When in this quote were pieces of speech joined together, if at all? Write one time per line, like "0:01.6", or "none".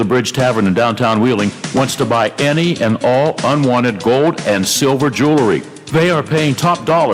none